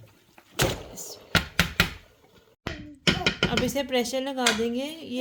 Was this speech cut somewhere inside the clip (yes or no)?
no